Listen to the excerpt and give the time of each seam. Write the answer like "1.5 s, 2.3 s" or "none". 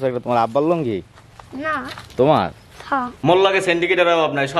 3.1 s